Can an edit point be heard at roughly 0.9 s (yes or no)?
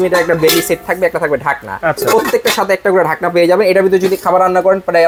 no